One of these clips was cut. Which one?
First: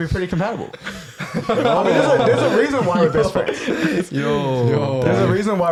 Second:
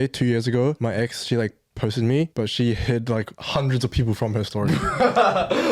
second; 3 cuts; at 0.8 s, 2.3 s, 3.4 s

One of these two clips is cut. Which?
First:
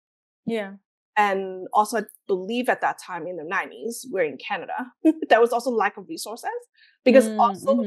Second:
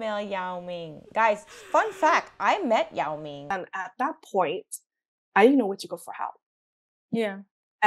second; 1 cut; at 3.6 s

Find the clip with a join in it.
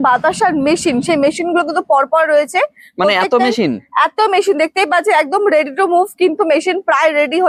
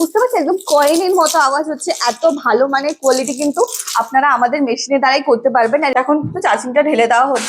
second; 1 cut; at 5.9 s

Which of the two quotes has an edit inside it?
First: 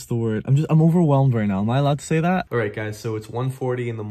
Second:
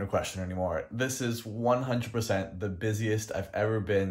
first; 1 cut; at 2.5 s

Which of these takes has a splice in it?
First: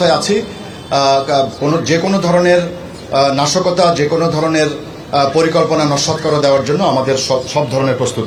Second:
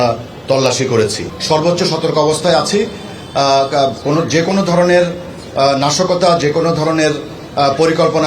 second; 1 cut; at 1.3 s

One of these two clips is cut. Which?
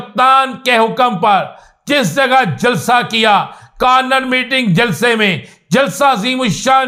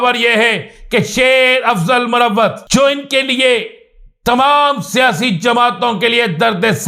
second; 1 cut; at 2.6 s

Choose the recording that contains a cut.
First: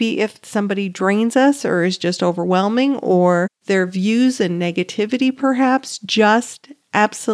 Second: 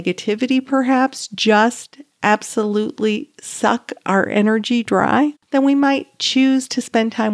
second; 1 cut; at 5.4 s

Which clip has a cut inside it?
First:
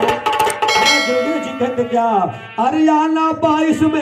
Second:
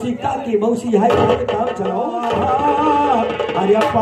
second; 1 cut; at 2.0 s

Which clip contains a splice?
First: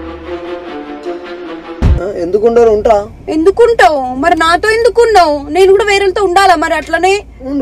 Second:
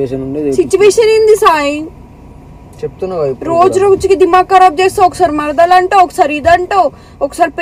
first; 1 cut; at 2.0 s

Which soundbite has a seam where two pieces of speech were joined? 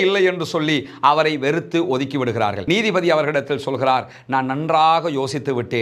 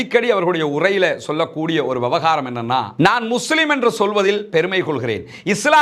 first; 1 cut; at 2.6 s

